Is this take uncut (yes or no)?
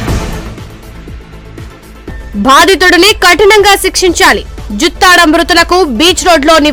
yes